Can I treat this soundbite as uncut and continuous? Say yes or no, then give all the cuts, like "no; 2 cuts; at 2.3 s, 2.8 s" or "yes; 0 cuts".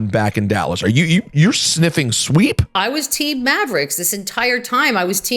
no; 1 cut; at 2.7 s